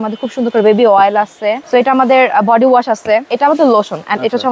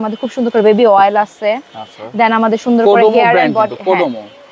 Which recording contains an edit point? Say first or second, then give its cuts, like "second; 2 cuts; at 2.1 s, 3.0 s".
first; 2 cuts; at 1.6 s, 3.3 s